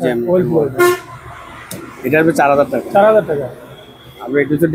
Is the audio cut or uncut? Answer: uncut